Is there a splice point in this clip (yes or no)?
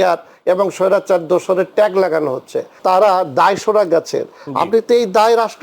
yes